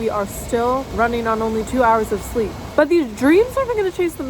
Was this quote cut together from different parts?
yes; 2 cuts; at 0.9 s, 2.6 s

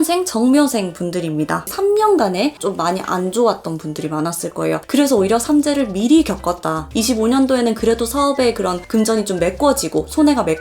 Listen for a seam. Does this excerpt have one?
yes; 3 cuts; at 1.7 s, 2.6 s, 6.9 s

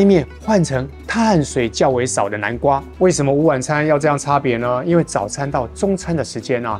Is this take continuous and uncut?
no; 1 cut; at 2.9 s

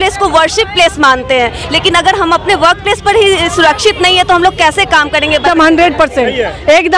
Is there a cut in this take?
yes; 1 cut; at 5.5 s

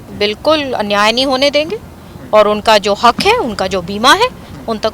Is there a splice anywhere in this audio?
no; 0 cuts

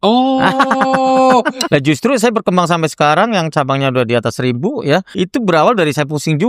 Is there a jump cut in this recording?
yes; 2 cuts; at 1.6 s, 5.1 s

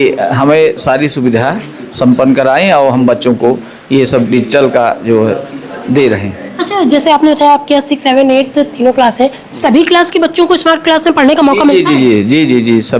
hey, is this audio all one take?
yes; 0 cuts

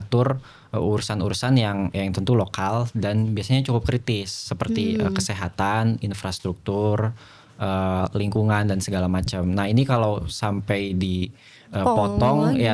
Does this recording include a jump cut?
no; 0 cuts

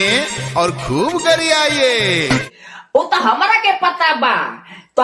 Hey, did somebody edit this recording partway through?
yes; 1 cut; at 2.4 s

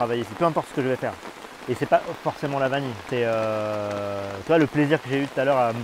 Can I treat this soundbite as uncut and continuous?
yes; 0 cuts

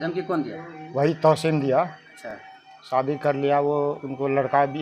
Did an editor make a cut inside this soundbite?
no; 0 cuts

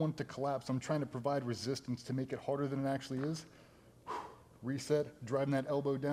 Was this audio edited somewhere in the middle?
no; 0 cuts

